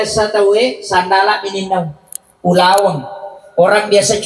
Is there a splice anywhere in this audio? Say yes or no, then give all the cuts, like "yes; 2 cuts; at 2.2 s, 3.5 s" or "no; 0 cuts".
no; 0 cuts